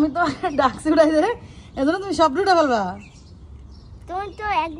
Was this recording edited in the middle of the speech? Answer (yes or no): no